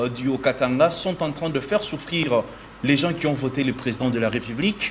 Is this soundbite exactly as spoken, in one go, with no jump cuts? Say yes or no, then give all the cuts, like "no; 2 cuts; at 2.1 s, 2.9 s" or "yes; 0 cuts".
yes; 0 cuts